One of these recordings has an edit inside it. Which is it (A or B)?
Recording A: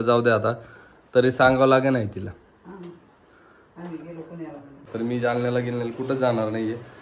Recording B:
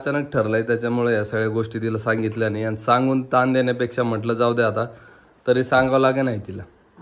A